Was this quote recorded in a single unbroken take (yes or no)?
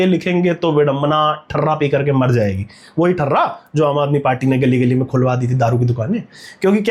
yes